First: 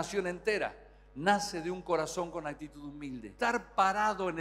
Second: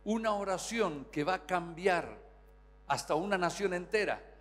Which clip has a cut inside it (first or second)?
first